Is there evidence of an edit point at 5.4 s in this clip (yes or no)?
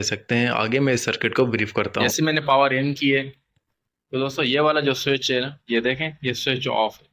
no